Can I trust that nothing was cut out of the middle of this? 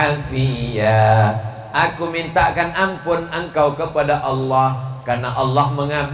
yes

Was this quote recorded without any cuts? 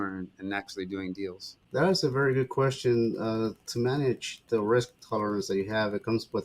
no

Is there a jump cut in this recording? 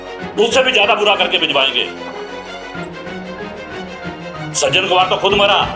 no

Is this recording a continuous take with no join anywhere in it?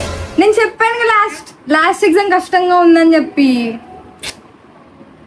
yes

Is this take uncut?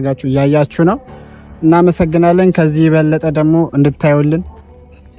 yes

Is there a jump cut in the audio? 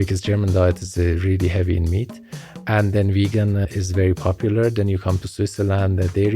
yes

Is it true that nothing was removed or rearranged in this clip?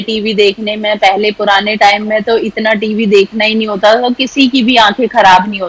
yes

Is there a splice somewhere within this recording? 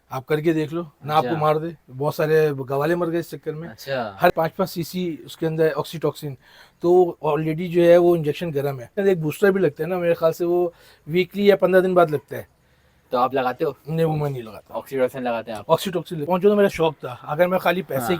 yes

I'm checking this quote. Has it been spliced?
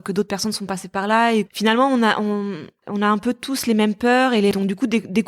yes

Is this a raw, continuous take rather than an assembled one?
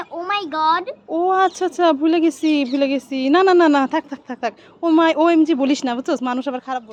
yes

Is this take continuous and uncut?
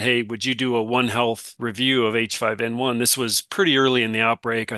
no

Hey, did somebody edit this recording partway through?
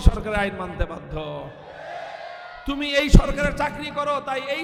no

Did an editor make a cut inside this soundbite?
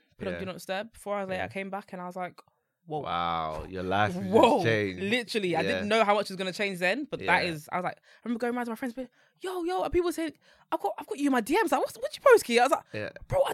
no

